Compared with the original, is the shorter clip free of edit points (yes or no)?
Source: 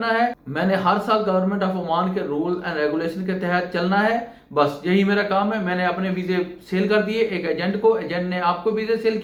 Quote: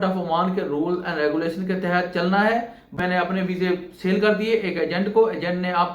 no